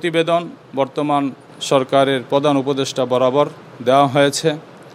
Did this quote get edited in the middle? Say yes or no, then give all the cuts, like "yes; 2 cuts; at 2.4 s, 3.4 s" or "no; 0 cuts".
yes; 1 cut; at 1.0 s